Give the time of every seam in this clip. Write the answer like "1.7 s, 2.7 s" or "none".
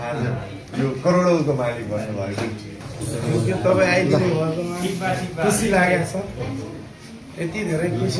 2.8 s